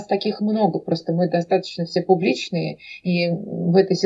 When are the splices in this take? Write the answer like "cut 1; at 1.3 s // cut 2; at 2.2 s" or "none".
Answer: none